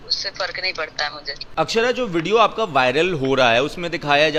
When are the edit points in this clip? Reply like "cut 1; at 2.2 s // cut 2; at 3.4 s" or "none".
none